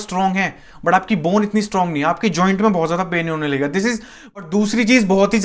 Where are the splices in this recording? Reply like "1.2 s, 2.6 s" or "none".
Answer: 4.2 s